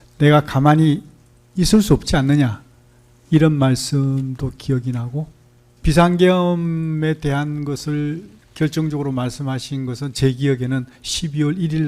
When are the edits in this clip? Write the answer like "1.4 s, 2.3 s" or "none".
5.8 s